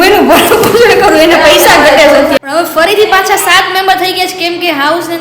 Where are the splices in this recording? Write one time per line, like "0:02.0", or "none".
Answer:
0:02.4

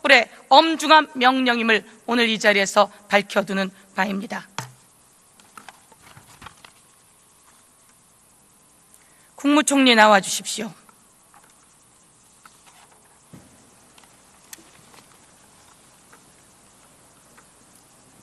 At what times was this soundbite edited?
0:03.4

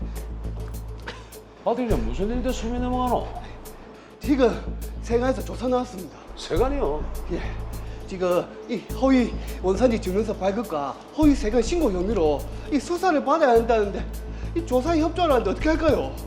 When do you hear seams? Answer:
none

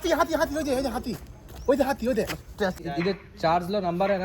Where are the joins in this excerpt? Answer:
0:02.8

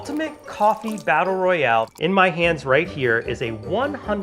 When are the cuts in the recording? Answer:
0:01.9

